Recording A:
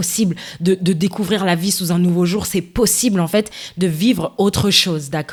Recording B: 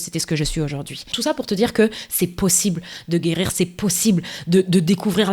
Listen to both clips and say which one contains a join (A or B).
B